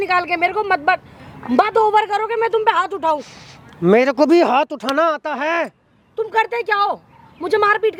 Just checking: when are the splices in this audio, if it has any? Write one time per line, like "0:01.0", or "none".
none